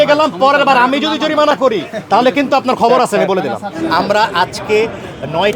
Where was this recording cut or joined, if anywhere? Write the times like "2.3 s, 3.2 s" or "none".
3.7 s

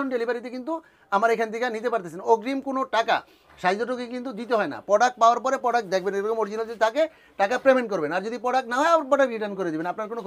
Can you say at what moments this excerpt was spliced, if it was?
none

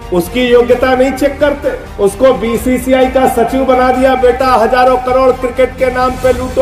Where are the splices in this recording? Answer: none

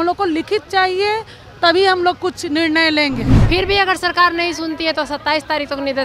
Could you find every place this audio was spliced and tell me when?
3.3 s

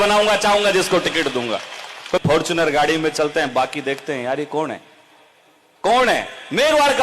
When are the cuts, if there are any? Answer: 2.2 s

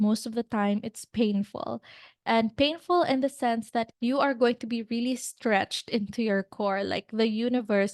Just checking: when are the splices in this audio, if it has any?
3.9 s

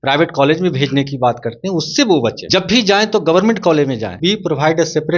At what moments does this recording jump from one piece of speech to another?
2.4 s, 4.2 s

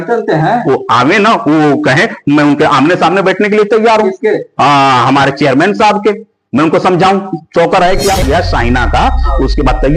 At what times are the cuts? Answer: 8.2 s

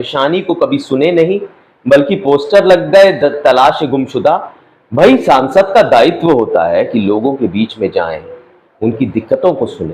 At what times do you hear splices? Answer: none

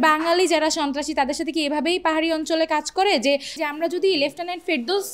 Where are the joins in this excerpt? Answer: 3.6 s

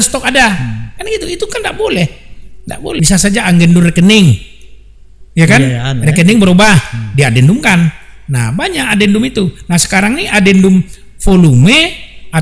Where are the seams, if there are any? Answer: 3.0 s

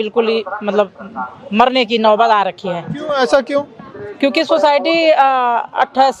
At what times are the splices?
none

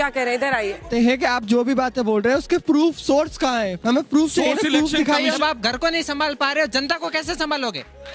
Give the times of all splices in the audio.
0.9 s, 5.4 s

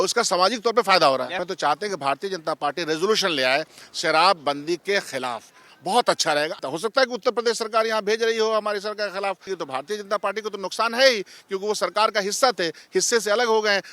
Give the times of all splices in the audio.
1.5 s, 6.6 s, 9.5 s

